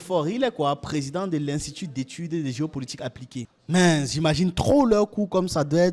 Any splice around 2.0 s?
no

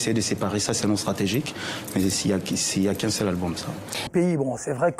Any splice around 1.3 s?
no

